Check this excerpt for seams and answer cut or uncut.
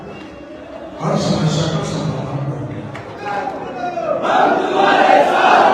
cut